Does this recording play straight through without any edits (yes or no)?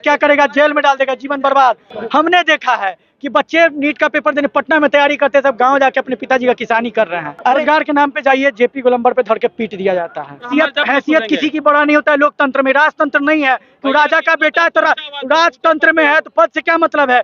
no